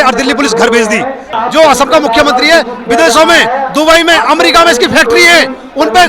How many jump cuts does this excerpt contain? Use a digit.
1